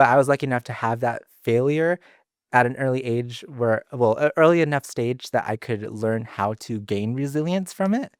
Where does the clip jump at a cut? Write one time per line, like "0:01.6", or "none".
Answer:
none